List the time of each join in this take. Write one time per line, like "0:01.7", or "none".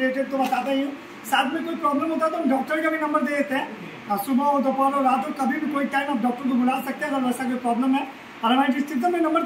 none